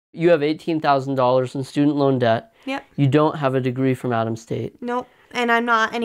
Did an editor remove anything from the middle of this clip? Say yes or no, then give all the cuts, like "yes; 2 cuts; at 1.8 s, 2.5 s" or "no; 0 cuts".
no; 0 cuts